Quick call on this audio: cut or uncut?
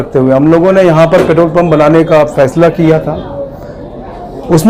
uncut